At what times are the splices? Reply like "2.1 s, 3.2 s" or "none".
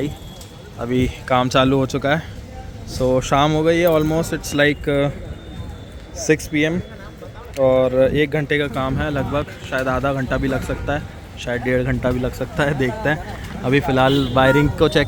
none